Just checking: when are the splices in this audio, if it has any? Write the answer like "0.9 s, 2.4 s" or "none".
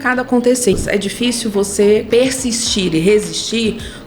0.8 s, 2.1 s